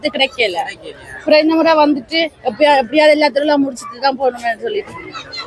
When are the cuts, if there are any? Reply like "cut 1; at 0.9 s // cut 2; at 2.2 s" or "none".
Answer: none